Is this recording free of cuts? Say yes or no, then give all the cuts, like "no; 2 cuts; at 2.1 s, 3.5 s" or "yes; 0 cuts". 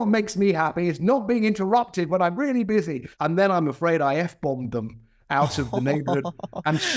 no; 1 cut; at 3.0 s